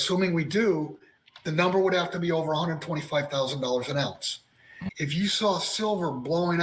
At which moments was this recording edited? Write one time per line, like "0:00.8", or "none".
0:04.8